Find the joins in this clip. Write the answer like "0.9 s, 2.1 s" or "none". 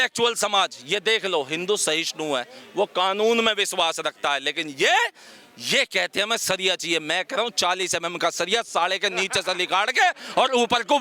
none